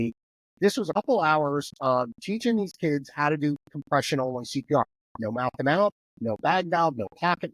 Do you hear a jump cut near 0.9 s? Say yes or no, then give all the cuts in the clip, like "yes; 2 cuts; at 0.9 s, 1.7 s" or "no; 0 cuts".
yes; 1 cut; at 0.9 s